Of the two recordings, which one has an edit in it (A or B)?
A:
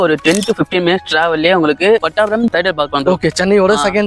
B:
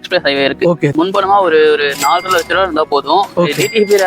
B